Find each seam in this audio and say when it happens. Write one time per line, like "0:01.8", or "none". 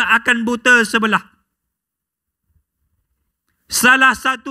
none